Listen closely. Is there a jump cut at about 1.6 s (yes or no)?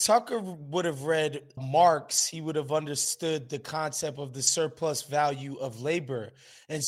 yes